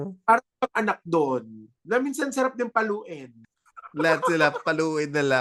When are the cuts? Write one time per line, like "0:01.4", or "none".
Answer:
0:01.8